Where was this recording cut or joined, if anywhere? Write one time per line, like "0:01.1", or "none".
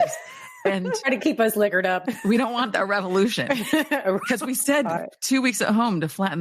0:01.0
0:02.0
0:05.0